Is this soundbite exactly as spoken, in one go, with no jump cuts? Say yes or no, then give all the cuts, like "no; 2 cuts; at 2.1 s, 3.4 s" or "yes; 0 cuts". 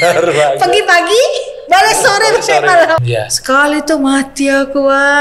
no; 1 cut; at 3.0 s